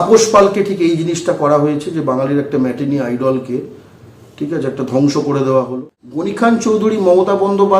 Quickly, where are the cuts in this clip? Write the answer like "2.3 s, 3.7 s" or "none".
5.8 s